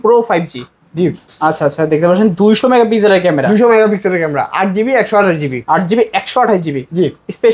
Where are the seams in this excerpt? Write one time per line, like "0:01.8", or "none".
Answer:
none